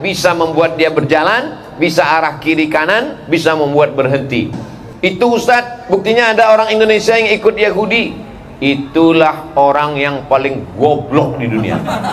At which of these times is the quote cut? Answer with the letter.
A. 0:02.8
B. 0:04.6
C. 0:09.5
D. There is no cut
B